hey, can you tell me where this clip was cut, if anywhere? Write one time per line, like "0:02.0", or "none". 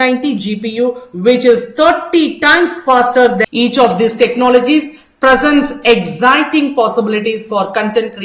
0:03.4